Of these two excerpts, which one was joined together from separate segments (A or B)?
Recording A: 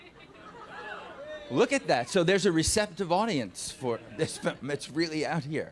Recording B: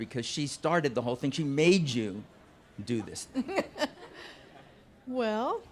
A